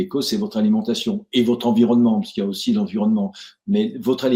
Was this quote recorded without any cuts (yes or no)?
yes